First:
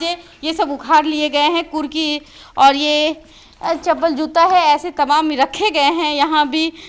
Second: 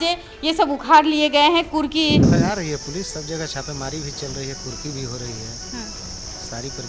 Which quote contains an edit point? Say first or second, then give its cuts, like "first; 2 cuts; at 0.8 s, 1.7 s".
second; 1 cut; at 2.3 s